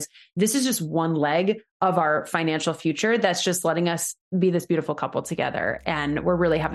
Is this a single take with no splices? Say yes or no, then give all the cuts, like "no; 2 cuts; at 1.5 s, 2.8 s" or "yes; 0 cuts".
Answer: yes; 0 cuts